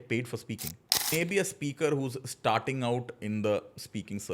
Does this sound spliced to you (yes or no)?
yes